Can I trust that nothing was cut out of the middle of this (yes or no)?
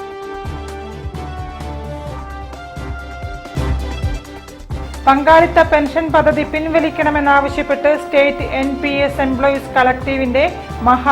no